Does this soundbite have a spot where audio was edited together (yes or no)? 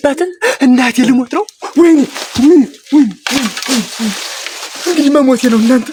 no